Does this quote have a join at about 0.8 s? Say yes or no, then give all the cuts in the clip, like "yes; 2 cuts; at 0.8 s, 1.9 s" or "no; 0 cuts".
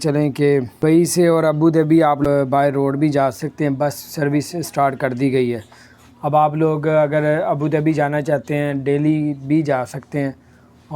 yes; 2 cuts; at 0.8 s, 2.2 s